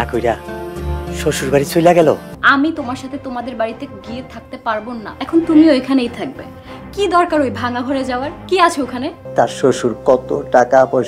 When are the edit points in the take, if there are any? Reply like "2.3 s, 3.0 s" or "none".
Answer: 2.3 s, 5.1 s, 9.2 s